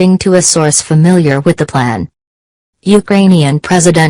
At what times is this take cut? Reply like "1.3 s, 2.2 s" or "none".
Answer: 2.6 s